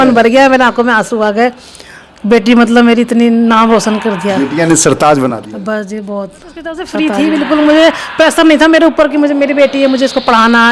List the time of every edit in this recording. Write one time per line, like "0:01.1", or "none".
0:06.9